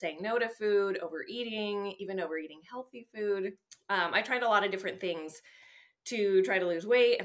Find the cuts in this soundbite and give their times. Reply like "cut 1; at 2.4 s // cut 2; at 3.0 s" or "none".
cut 1; at 3.7 s